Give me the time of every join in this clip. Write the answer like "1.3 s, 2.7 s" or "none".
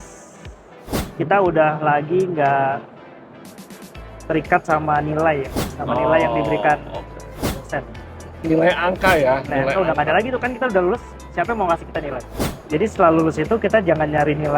12.4 s